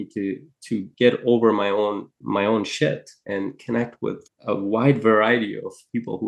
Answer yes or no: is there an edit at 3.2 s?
yes